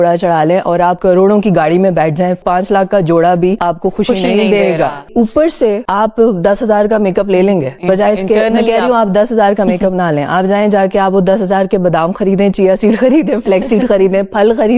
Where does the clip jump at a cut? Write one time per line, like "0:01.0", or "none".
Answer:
0:02.4
0:05.1